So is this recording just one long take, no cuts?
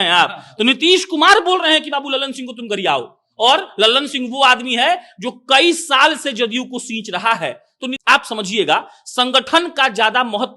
no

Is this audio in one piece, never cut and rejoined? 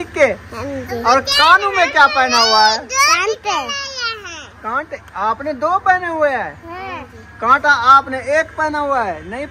yes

